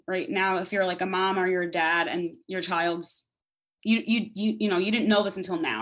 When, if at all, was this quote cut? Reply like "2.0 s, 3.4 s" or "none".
none